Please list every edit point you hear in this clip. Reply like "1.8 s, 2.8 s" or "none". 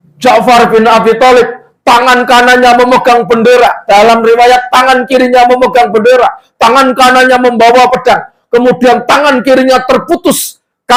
none